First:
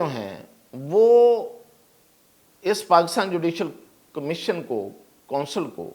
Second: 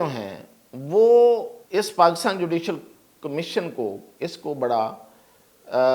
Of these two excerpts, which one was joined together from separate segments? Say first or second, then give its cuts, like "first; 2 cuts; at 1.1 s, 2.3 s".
second; 2 cuts; at 1.6 s, 4.1 s